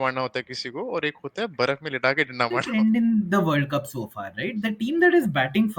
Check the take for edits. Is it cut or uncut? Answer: cut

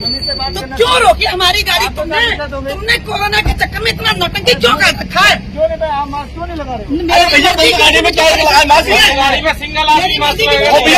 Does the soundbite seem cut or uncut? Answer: uncut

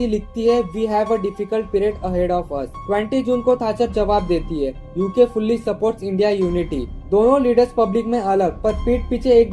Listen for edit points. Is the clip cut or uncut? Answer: uncut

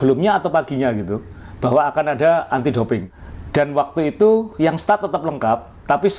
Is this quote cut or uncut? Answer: cut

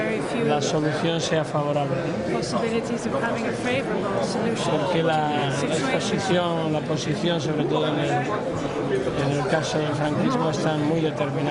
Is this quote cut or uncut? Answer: uncut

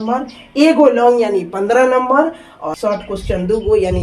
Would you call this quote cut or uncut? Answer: cut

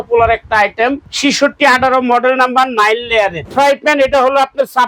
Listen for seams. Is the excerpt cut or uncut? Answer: cut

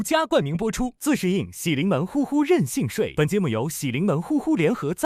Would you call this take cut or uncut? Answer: cut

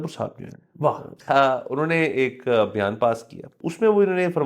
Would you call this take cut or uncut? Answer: cut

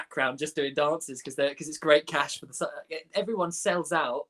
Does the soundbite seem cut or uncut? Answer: uncut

